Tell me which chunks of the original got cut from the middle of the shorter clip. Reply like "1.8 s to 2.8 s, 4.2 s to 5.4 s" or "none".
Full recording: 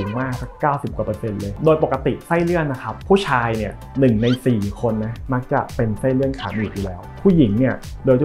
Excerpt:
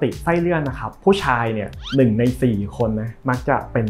none